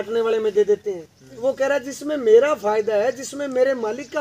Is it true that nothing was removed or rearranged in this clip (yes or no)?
no